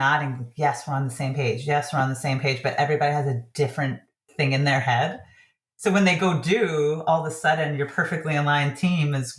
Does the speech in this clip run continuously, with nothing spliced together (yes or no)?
yes